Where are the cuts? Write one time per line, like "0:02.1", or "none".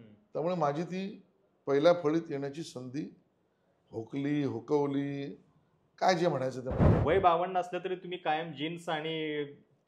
0:06.8